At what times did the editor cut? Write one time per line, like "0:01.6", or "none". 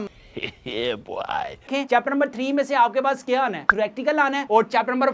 0:01.7

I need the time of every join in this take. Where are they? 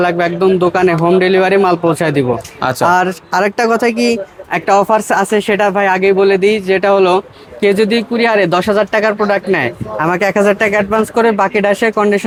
none

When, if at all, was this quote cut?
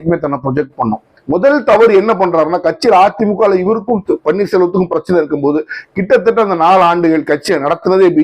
0:01.1

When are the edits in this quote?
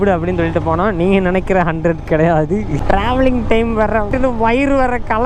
0:02.7
0:04.1

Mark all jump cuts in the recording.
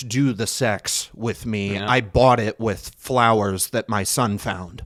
none

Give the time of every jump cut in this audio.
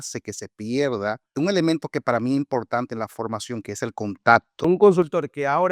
0:01.3
0:04.6

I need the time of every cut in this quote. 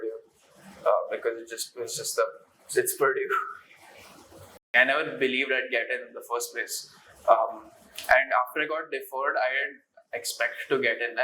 0:04.6

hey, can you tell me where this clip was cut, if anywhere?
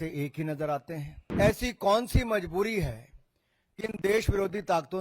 0:01.2

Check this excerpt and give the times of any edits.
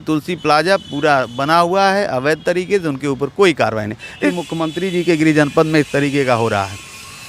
0:04.4

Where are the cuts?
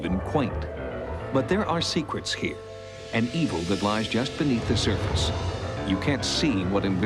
0:05.0

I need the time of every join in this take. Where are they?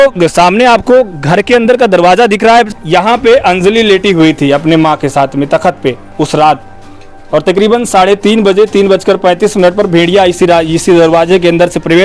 0:02.7

